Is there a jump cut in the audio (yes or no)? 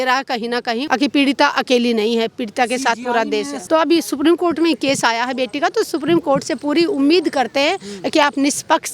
yes